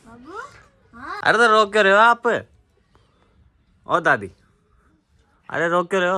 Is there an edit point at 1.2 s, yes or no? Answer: yes